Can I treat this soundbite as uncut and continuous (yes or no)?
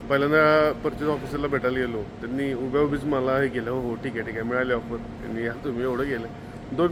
yes